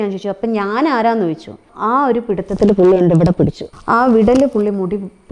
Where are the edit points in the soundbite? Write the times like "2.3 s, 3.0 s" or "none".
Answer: 1.7 s, 3.6 s